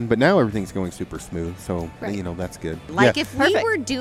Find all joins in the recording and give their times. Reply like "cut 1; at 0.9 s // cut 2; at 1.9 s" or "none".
cut 1; at 2.8 s